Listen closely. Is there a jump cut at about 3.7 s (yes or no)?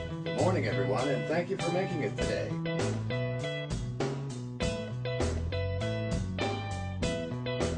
yes